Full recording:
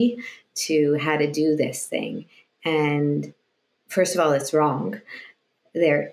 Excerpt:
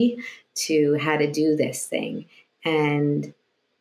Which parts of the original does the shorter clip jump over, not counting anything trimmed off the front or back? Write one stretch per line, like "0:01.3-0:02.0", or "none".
none